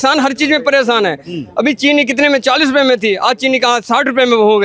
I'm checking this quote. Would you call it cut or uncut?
uncut